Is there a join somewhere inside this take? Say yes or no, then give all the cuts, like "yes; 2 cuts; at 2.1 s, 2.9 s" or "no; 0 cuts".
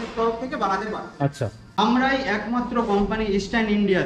yes; 1 cut; at 1.6 s